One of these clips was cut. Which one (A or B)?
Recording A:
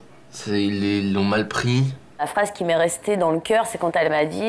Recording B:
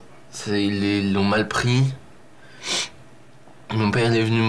A